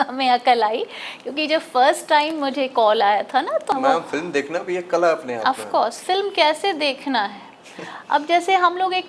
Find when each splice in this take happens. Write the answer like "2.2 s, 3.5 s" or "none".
3.7 s